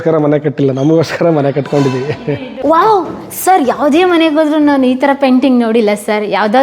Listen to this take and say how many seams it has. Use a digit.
1